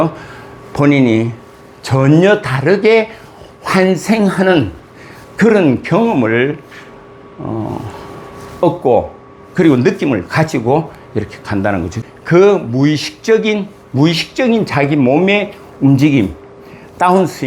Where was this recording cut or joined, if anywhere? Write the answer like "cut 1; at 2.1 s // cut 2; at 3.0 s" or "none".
cut 1; at 11.9 s